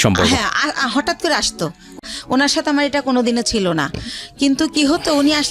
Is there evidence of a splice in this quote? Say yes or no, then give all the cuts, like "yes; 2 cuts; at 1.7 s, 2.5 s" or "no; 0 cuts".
yes; 1 cut; at 2.0 s